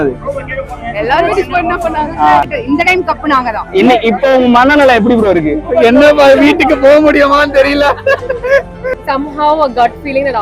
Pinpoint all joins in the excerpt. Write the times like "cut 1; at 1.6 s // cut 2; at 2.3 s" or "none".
cut 1; at 2.5 s // cut 2; at 8.9 s